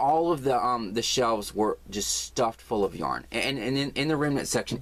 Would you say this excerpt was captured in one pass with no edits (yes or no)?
yes